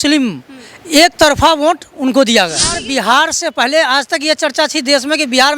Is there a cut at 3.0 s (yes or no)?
yes